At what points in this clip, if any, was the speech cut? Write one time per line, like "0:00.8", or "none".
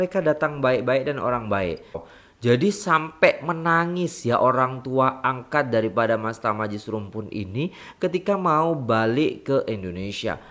0:02.1